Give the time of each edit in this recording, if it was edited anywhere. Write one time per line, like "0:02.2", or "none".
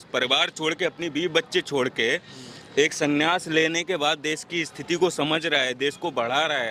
none